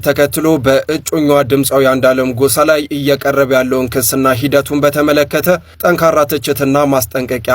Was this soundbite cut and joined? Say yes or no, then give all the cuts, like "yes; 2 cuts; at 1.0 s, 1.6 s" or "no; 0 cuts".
no; 0 cuts